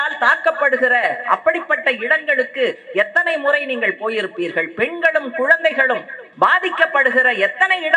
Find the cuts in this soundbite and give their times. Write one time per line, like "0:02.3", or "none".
0:06.2